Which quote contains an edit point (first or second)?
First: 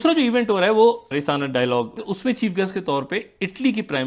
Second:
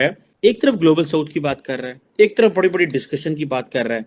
first